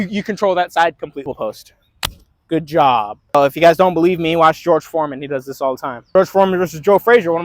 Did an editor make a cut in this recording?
yes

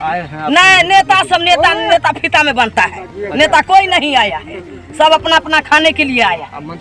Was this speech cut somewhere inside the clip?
no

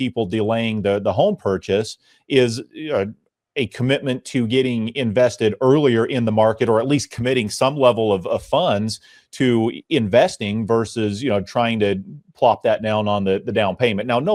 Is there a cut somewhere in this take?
no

